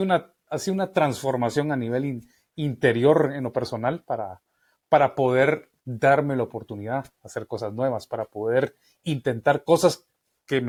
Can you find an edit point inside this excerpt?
no; 0 cuts

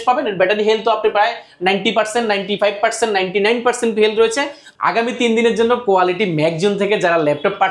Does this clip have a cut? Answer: yes; 1 cut; at 4.7 s

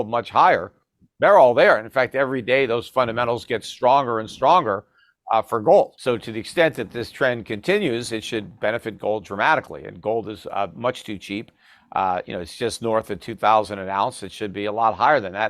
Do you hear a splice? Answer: yes; 1 cut; at 6.0 s

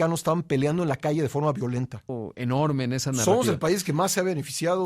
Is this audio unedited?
no; 1 cut; at 2.2 s

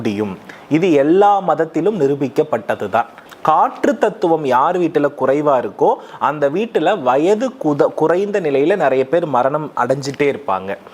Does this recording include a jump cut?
yes; 1 cut; at 3.2 s

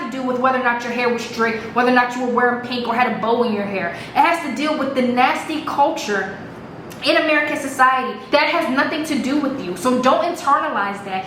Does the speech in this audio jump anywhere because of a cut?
no; 0 cuts

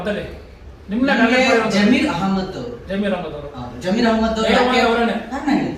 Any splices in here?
no; 0 cuts

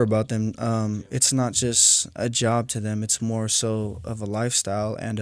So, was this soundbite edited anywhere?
no; 0 cuts

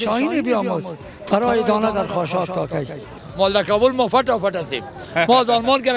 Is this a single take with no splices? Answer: no; 1 cut; at 3.2 s

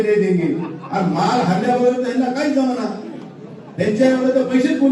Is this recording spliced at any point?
no; 0 cuts

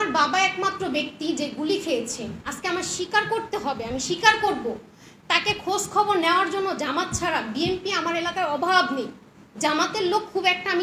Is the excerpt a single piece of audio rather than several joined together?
yes; 0 cuts

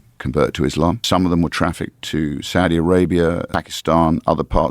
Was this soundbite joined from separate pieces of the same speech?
yes; 2 cuts; at 1.0 s, 3.5 s

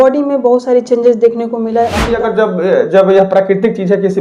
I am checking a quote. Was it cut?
yes; 1 cut; at 2.1 s

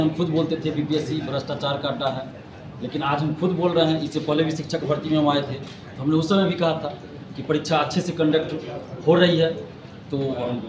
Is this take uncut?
yes; 0 cuts

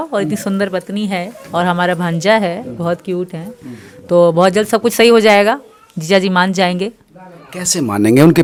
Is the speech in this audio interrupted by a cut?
no; 0 cuts

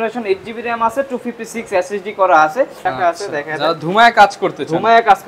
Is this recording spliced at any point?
yes; 1 cut; at 2.8 s

